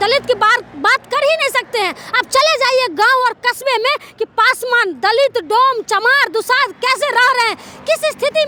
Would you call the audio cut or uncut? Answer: uncut